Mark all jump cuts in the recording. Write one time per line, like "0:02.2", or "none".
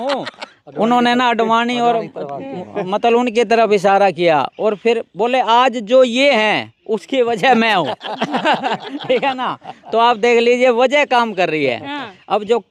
none